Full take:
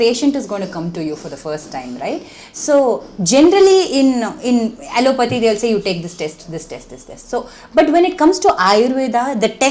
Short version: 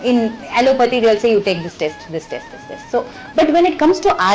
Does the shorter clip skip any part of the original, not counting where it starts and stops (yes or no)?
no